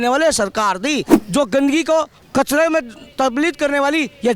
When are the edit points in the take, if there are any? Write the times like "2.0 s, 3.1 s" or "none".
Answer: 1.1 s